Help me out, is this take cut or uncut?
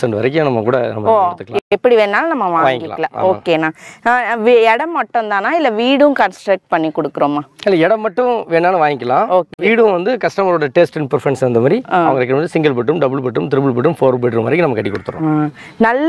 uncut